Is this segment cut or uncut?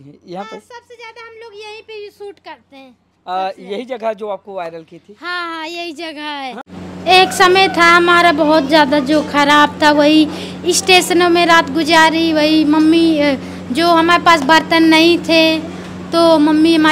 cut